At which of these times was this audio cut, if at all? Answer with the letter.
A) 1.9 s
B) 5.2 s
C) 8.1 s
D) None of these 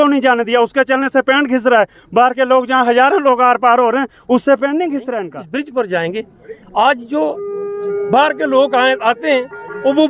B